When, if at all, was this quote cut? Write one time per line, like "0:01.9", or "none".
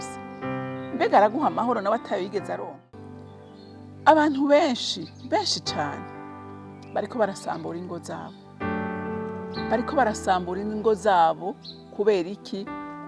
0:03.4

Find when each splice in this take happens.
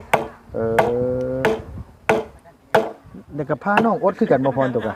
none

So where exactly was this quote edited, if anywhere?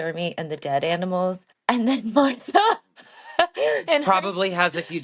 0:01.5

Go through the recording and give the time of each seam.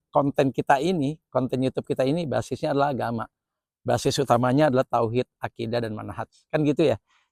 none

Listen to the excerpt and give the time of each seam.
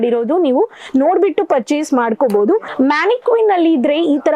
0:02.7

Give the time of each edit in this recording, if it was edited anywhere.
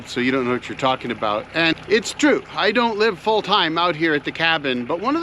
0:01.8

